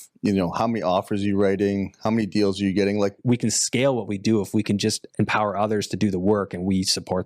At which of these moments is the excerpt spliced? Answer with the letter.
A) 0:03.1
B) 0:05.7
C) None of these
A